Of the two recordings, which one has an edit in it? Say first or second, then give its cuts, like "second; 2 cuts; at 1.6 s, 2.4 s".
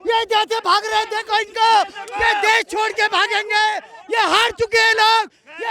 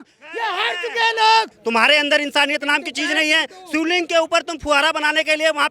second; 1 cut; at 1.6 s